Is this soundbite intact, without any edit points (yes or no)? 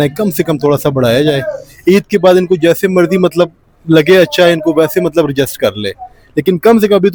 yes